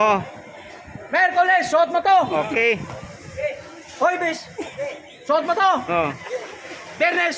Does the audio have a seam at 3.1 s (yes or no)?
no